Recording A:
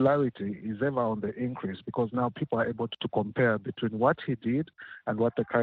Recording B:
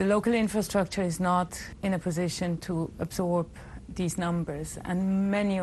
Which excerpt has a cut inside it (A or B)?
B